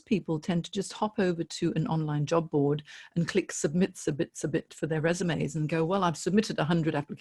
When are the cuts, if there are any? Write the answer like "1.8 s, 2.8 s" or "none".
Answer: none